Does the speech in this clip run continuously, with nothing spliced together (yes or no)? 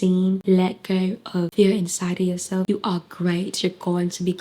no